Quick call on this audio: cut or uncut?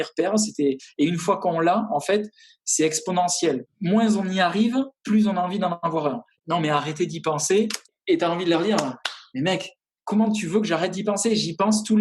cut